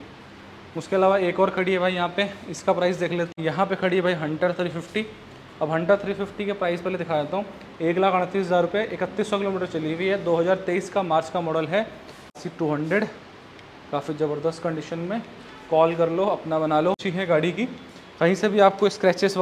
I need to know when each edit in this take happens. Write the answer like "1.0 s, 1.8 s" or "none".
3.3 s, 12.3 s, 17.1 s